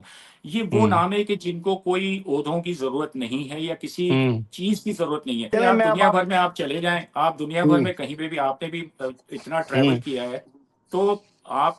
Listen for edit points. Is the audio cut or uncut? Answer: cut